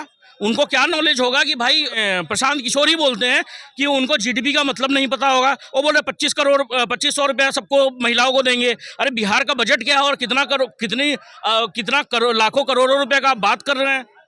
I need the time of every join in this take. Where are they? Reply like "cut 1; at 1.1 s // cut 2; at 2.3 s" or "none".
cut 1; at 2.0 s